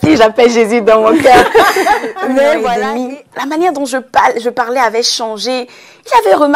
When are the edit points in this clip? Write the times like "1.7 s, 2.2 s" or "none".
2.8 s